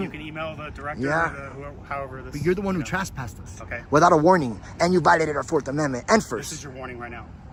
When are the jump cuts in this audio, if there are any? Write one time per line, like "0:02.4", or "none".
none